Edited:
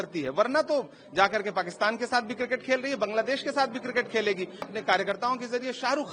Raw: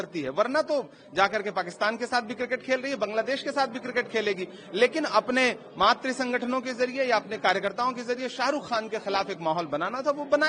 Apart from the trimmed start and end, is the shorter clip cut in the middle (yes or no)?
yes